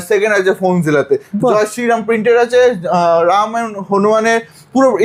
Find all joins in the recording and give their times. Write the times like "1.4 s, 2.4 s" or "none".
none